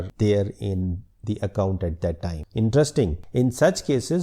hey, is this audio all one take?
no; 1 cut; at 2.4 s

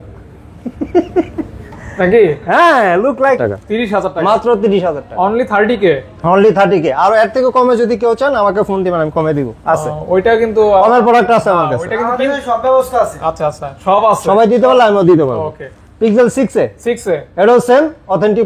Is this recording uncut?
no; 1 cut; at 3.4 s

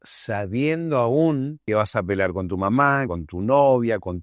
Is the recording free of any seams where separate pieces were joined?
no; 2 cuts; at 1.6 s, 3.1 s

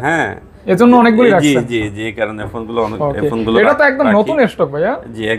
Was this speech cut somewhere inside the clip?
no; 0 cuts

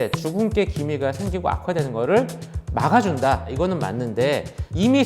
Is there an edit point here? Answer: yes; 1 cut; at 3.5 s

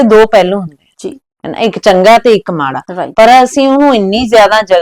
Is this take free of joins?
yes; 0 cuts

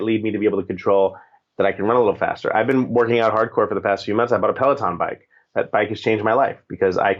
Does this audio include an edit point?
no; 0 cuts

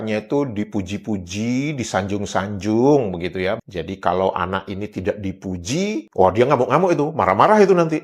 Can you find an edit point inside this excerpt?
yes; 1 cut; at 3.6 s

